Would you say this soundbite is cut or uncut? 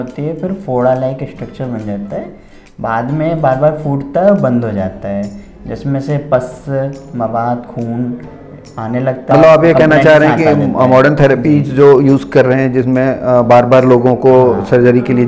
cut